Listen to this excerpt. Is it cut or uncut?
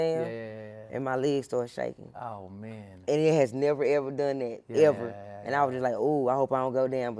uncut